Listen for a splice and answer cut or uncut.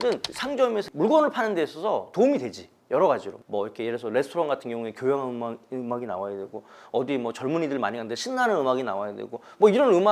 uncut